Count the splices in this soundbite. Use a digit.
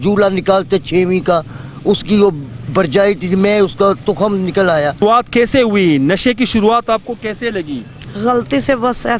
1